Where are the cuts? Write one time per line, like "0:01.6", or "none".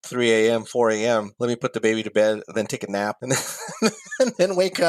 0:01.3
0:03.1